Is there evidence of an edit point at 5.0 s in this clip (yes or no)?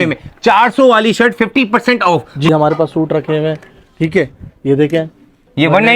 no